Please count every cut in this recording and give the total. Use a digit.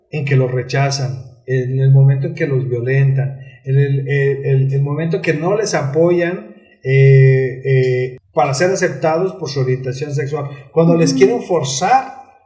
1